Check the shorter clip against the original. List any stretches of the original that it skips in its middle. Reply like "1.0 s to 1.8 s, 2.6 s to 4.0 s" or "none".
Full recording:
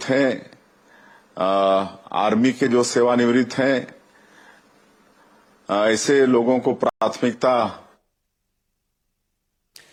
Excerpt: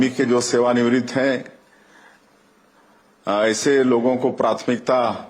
6.8 s to 7.0 s